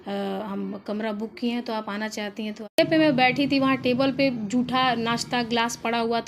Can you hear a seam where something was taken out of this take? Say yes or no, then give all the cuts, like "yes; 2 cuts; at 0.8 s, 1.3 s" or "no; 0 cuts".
yes; 1 cut; at 2.8 s